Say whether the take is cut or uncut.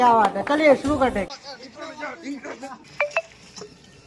cut